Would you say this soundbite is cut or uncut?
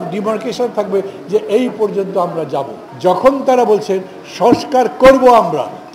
cut